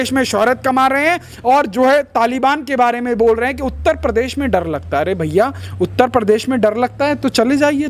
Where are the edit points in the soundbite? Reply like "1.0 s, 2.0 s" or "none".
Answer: none